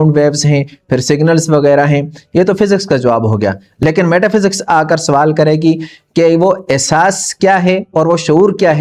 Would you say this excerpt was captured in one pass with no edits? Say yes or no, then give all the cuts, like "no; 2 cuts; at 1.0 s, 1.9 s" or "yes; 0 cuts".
yes; 0 cuts